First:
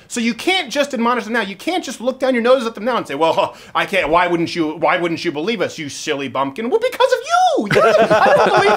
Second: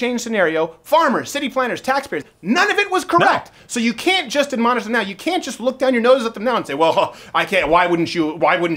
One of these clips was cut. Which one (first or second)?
second